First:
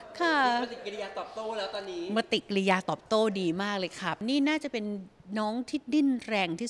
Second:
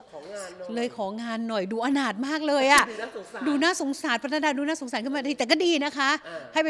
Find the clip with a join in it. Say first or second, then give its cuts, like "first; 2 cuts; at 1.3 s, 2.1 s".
first; 1 cut; at 4.2 s